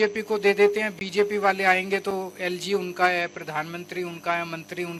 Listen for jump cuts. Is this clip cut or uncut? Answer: uncut